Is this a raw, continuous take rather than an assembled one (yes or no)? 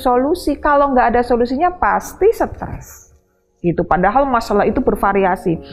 yes